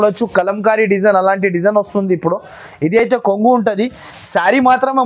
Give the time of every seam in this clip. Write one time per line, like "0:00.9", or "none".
none